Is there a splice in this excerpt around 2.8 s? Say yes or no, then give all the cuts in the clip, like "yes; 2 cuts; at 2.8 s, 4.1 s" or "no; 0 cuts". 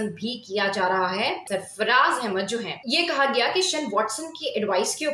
yes; 2 cuts; at 1.4 s, 2.8 s